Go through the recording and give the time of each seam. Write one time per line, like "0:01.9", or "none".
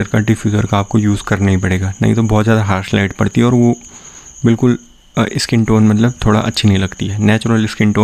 none